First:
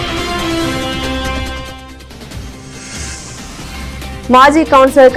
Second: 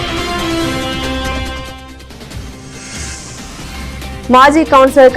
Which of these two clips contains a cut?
second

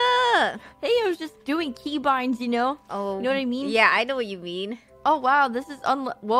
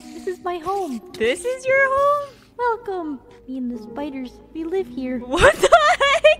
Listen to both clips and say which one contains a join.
first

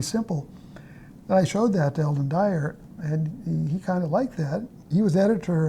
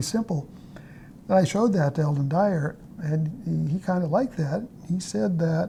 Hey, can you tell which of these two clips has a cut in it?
first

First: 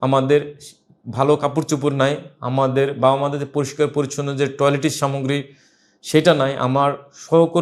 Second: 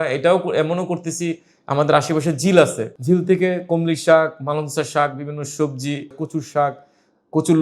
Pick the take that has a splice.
second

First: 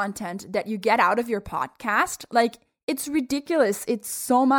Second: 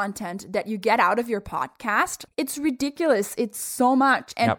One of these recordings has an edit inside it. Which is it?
second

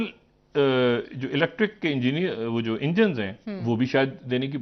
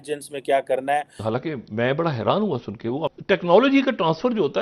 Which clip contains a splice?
second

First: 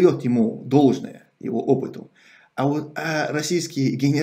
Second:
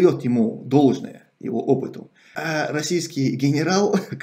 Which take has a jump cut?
second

